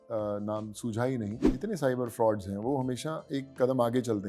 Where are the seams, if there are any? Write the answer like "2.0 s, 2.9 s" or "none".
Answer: 1.4 s